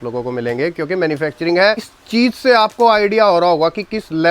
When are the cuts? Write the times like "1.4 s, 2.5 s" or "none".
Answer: 1.9 s